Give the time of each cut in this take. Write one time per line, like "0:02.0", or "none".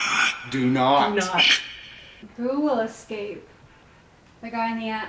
0:02.1